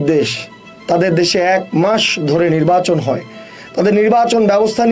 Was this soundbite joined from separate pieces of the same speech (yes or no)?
no